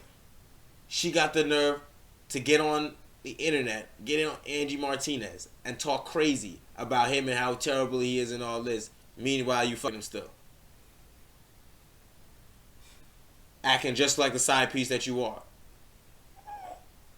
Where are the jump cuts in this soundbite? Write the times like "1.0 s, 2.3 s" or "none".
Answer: 9.9 s